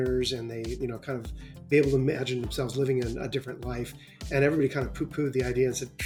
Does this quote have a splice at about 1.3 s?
no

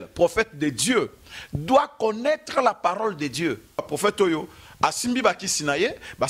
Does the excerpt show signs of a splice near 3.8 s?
yes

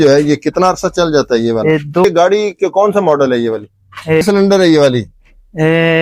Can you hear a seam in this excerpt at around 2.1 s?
yes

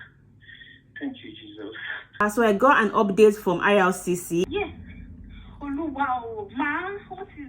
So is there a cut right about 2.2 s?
yes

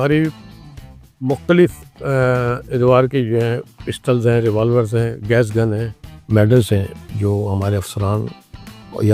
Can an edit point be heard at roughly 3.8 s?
no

